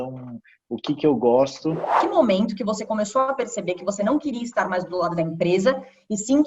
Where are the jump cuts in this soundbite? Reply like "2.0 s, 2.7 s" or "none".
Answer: 2.0 s